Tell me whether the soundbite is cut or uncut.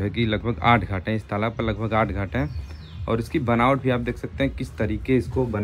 uncut